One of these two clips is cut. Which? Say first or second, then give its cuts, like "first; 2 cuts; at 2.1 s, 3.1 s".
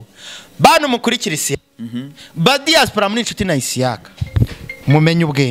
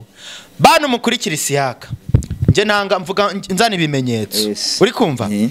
first; 1 cut; at 1.5 s